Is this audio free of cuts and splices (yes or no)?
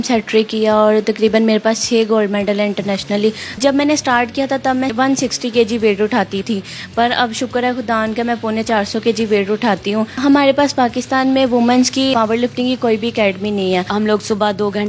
no